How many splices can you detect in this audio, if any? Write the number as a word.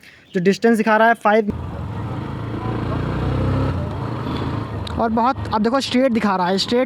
one